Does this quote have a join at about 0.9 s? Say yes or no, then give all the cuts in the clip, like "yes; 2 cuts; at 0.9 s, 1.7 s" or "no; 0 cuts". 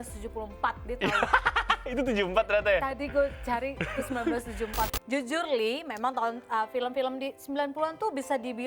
no; 1 cut; at 4.9 s